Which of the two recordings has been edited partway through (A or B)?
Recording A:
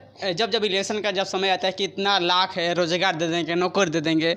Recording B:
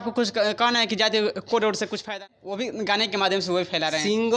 B